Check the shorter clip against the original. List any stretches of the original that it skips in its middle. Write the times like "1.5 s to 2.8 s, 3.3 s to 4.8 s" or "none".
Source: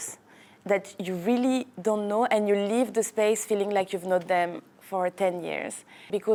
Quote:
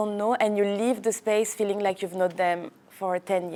none